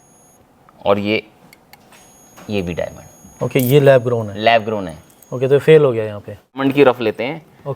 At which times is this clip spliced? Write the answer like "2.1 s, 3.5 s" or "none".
6.6 s

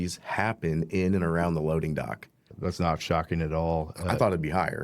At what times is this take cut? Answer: 2.5 s

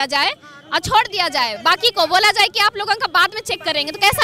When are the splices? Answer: none

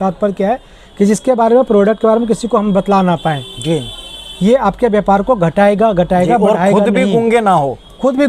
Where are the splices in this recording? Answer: none

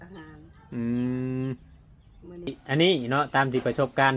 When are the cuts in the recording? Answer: 2.6 s

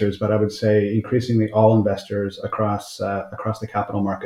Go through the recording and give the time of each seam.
none

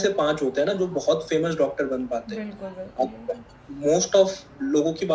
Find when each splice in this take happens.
none

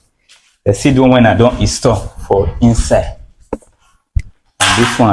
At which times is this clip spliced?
none

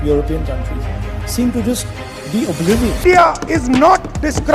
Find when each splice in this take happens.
3.0 s

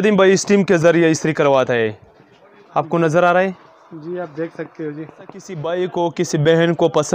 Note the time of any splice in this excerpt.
5.6 s

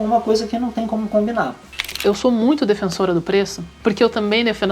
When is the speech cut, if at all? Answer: 1.9 s

